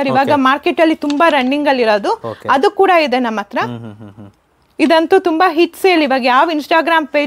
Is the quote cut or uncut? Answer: uncut